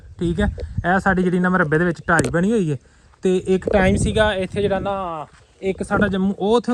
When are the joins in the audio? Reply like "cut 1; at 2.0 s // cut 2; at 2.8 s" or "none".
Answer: none